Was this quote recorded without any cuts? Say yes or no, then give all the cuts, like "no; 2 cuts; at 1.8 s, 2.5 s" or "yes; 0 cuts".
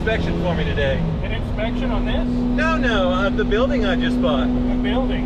yes; 0 cuts